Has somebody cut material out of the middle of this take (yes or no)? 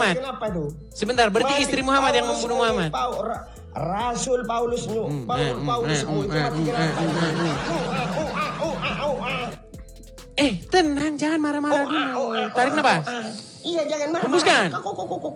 no